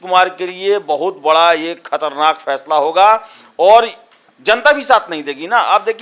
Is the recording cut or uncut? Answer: uncut